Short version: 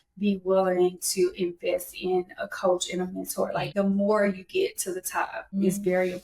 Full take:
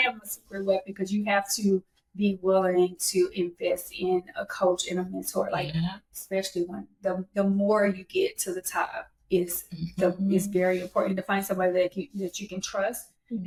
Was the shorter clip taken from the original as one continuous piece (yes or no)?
no